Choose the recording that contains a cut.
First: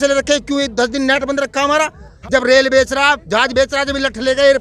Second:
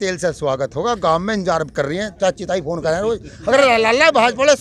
first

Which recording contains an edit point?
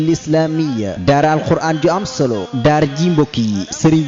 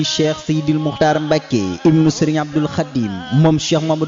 first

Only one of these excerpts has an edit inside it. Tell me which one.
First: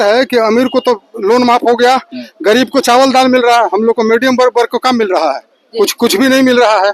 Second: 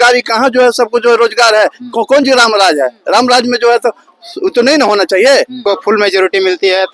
second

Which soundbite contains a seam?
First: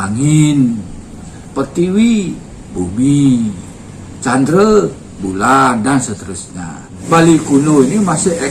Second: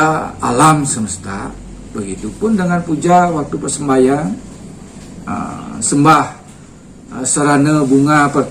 first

